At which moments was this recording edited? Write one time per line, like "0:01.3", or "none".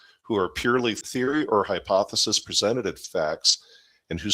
0:01.0